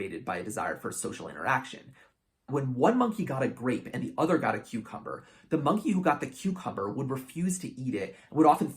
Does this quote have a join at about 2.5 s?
yes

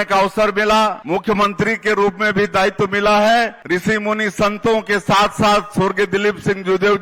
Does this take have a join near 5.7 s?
no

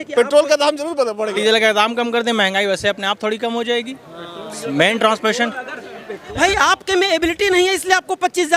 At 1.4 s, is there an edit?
yes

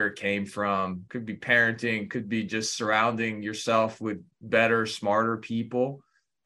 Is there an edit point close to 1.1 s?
yes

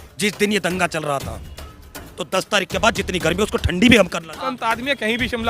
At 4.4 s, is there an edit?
yes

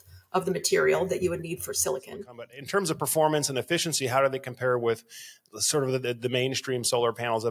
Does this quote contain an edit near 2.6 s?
yes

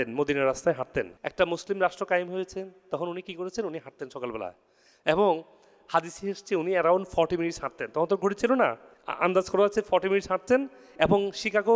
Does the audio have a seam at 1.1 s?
yes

